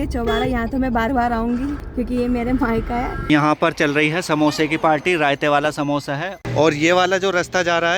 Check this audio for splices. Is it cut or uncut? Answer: cut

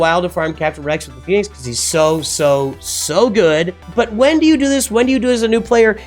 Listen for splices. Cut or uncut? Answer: cut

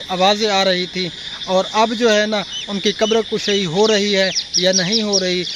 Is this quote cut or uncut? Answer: uncut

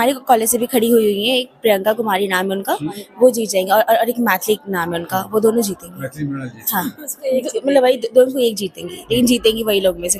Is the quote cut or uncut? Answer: uncut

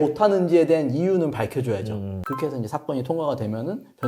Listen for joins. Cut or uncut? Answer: cut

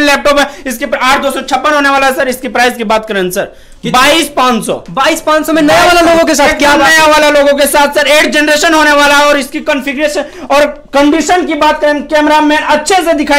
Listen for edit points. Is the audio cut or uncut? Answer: uncut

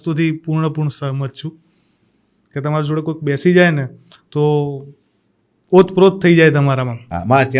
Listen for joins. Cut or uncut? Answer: uncut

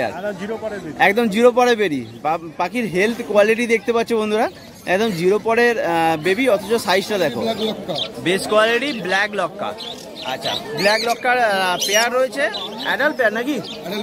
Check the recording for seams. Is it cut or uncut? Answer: cut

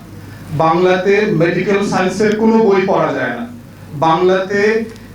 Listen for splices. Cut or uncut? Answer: uncut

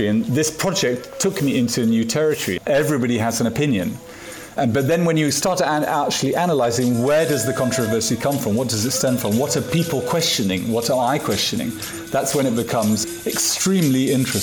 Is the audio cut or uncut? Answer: cut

